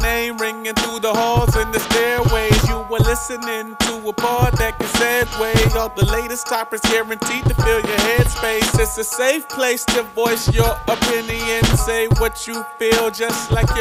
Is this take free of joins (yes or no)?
yes